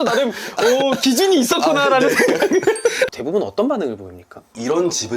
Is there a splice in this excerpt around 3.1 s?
yes; 1 cut; at 3.1 s

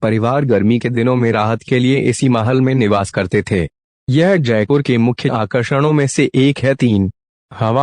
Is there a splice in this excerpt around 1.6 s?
yes; 1 cut; at 1.6 s

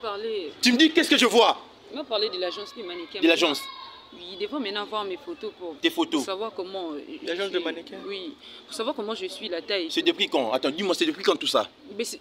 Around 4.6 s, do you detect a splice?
no; 0 cuts

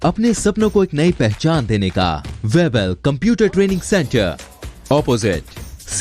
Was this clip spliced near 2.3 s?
yes; 1 cut; at 2.3 s

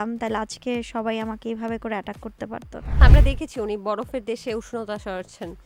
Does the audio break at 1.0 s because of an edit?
no; 1 cut; at 3.0 s

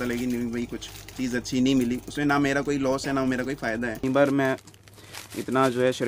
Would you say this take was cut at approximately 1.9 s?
no; 1 cut; at 4.0 s

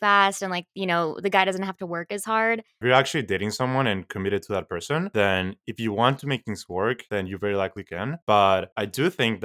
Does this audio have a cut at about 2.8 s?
yes; 1 cut; at 2.8 s

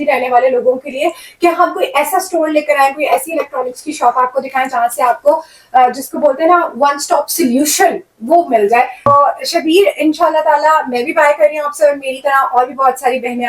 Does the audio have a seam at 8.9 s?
no; 0 cuts

